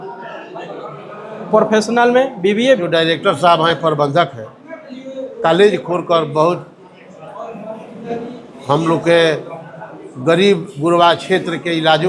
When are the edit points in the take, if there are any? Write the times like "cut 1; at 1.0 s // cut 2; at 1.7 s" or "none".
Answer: cut 1; at 2.8 s